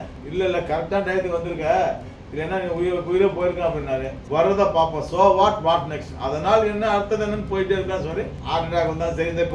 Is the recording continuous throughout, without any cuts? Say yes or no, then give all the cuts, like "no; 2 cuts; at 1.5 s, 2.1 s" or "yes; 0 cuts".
no; 1 cut; at 4.2 s